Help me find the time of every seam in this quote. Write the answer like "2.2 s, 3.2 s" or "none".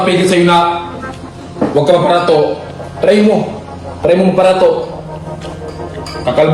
none

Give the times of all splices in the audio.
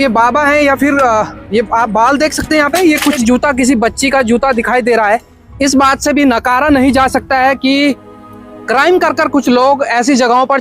3.2 s, 5.4 s

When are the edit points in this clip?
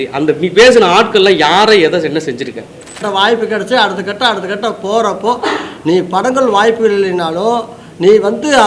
3.0 s

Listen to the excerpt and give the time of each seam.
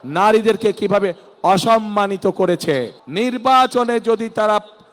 3.0 s

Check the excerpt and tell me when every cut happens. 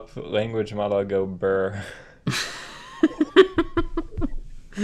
none

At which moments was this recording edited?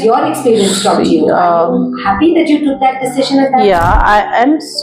none

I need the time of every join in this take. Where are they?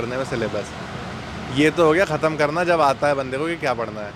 none

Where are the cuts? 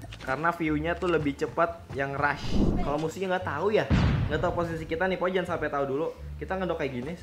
2.7 s

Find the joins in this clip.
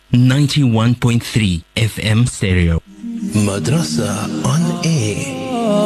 2.8 s

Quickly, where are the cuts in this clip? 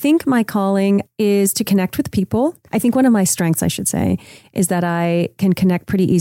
1.1 s, 2.6 s

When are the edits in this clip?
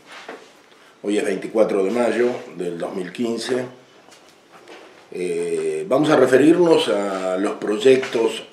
none

